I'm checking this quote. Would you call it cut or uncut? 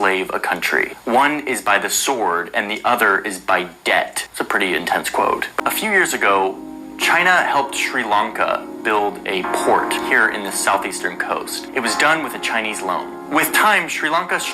cut